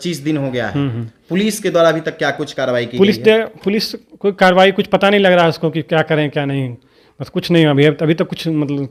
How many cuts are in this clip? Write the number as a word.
zero